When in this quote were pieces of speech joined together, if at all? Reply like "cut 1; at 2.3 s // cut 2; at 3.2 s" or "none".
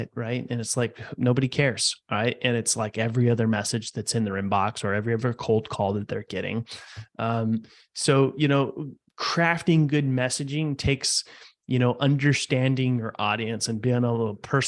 none